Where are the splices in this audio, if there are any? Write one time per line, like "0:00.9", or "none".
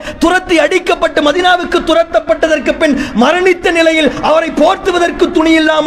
none